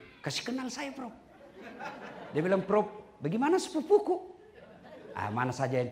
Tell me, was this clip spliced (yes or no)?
no